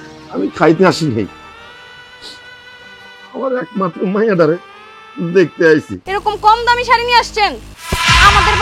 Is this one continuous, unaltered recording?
no; 1 cut; at 6.0 s

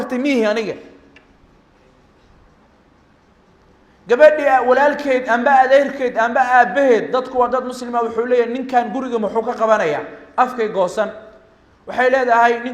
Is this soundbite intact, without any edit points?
yes; 0 cuts

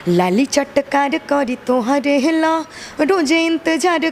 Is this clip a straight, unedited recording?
yes; 0 cuts

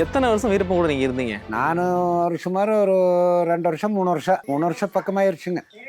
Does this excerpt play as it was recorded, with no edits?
no; 2 cuts; at 1.4 s, 4.4 s

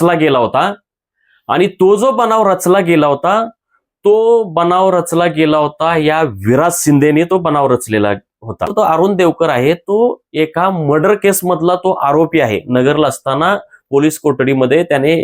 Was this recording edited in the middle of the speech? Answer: yes; 1 cut; at 8.7 s

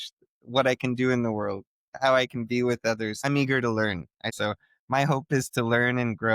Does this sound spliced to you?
yes; 2 cuts; at 3.2 s, 4.3 s

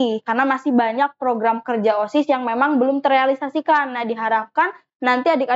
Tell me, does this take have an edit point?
no; 0 cuts

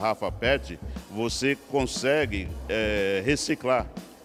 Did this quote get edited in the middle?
no; 0 cuts

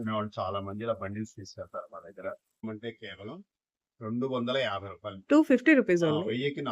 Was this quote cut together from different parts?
yes; 1 cut; at 2.6 s

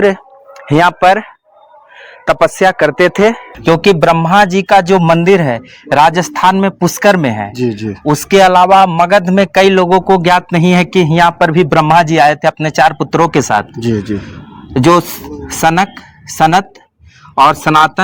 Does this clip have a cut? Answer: yes; 1 cut; at 3.5 s

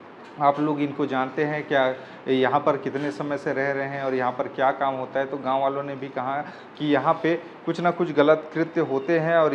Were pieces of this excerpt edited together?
no; 0 cuts

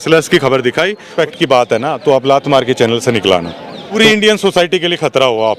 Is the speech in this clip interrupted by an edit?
yes; 2 cuts; at 1.1 s, 4.0 s

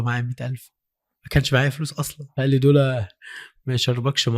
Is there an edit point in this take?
yes; 1 cut; at 2.2 s

